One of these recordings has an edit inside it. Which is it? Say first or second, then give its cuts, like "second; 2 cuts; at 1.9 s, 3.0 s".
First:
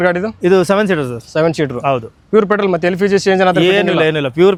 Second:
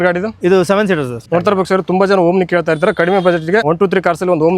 second; 2 cuts; at 1.2 s, 3.7 s